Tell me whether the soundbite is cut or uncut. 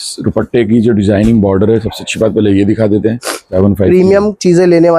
cut